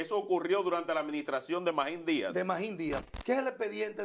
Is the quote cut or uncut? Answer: cut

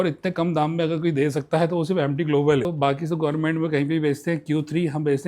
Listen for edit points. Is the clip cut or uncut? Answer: cut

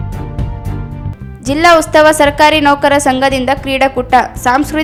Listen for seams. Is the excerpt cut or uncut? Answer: uncut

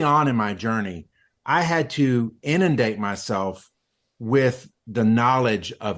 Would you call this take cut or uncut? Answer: uncut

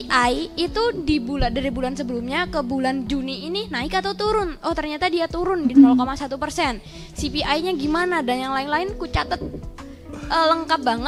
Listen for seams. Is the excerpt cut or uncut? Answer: uncut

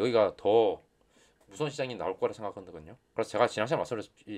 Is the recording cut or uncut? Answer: uncut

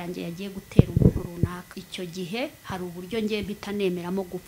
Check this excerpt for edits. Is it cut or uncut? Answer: cut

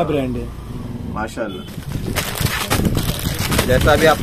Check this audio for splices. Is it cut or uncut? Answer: uncut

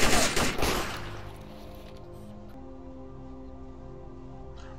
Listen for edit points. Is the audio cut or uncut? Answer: cut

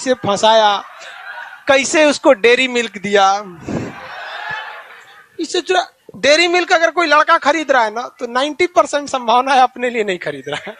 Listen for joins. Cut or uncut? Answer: uncut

